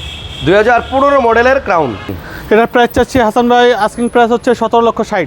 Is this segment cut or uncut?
cut